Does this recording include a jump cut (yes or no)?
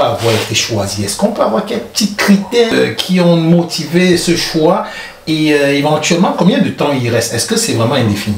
yes